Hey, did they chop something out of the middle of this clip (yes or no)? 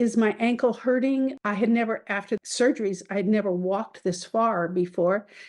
yes